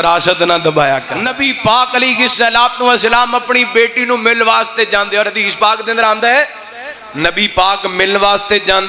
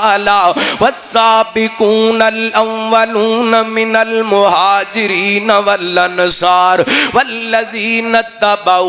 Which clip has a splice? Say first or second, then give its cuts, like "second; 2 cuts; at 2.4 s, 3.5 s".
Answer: first; 1 cut; at 1.3 s